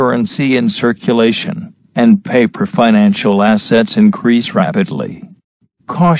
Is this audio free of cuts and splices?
no; 1 cut; at 1.1 s

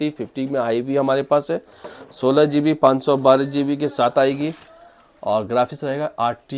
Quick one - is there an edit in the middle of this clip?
no; 0 cuts

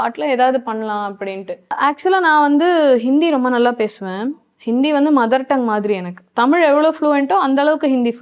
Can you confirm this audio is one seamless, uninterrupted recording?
no; 1 cut; at 1.8 s

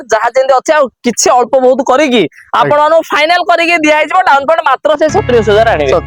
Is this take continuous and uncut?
yes; 0 cuts

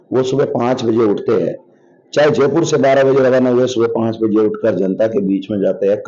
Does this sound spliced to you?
no; 0 cuts

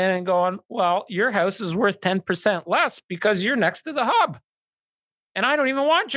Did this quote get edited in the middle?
no; 0 cuts

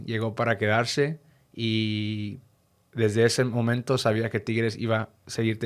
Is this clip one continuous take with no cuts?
yes; 0 cuts

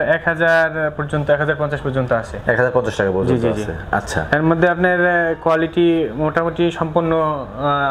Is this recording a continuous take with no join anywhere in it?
yes; 0 cuts

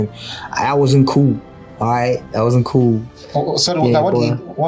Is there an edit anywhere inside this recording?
no; 0 cuts

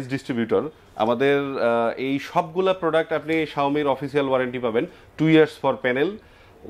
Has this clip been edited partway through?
no; 0 cuts

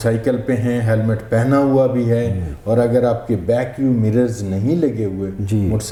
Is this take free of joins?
yes; 0 cuts

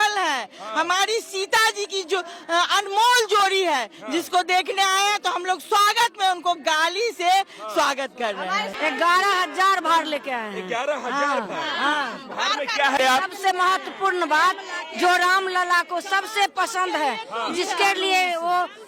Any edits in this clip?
yes; 2 cuts; at 8.7 s, 13.0 s

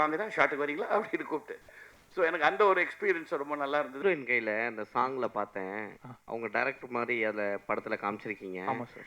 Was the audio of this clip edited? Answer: yes; 1 cut; at 4.0 s

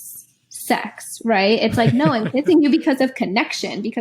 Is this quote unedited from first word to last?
yes; 0 cuts

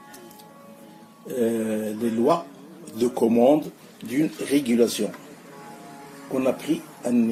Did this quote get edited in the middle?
no; 0 cuts

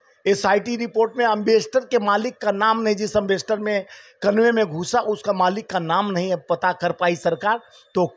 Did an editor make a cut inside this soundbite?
no; 0 cuts

